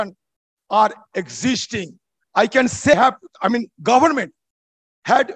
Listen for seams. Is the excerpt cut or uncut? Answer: cut